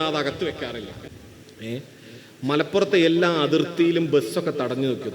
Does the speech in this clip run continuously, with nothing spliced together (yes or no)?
no